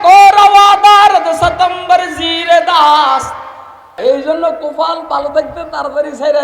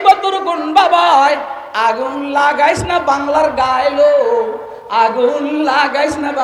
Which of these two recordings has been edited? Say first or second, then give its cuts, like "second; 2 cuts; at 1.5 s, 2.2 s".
first; 1 cut; at 3.9 s